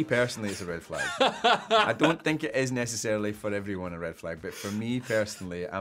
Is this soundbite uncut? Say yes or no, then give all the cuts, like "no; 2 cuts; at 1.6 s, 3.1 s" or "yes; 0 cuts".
yes; 0 cuts